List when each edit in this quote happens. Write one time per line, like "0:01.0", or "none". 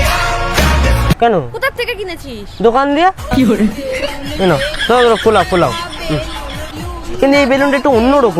0:01.2
0:06.7